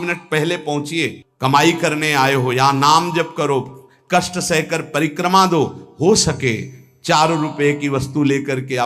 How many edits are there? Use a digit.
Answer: 1